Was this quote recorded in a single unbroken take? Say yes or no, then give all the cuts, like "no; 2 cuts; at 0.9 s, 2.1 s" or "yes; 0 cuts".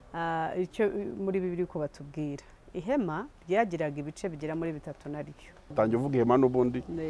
no; 1 cut; at 5.7 s